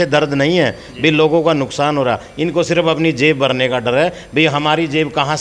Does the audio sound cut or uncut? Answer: uncut